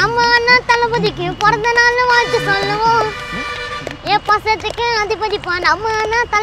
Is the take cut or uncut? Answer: uncut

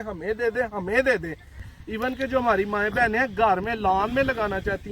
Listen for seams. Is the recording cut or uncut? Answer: cut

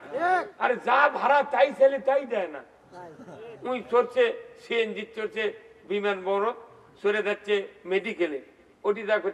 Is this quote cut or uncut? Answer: uncut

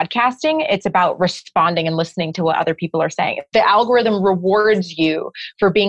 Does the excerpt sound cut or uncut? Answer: cut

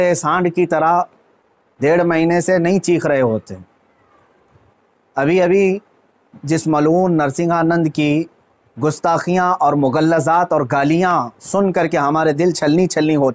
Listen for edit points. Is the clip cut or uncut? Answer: uncut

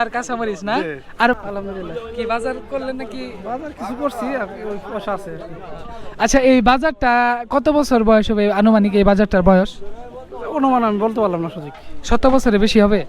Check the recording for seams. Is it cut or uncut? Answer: cut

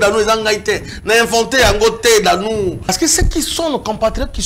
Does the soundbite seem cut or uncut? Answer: cut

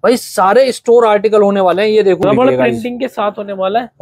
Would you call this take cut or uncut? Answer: cut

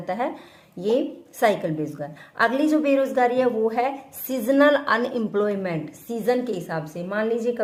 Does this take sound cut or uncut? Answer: uncut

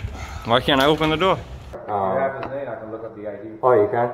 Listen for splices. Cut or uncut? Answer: cut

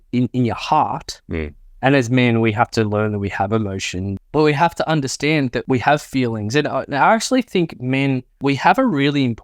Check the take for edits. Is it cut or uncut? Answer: cut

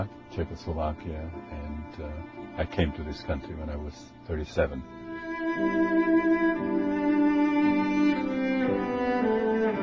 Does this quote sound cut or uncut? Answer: uncut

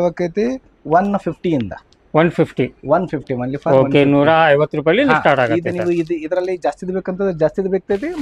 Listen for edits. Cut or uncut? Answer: uncut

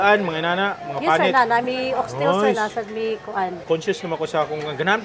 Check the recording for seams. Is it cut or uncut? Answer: cut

